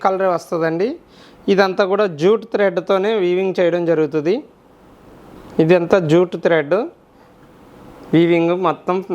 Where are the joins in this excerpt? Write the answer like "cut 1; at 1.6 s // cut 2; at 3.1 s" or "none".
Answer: none